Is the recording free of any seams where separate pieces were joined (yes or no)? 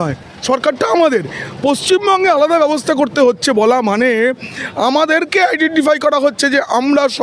yes